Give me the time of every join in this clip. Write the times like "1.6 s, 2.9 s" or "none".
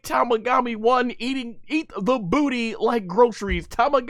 none